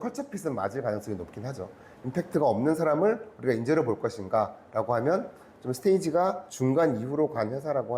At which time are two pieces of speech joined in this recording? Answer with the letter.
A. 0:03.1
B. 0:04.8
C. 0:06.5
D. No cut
C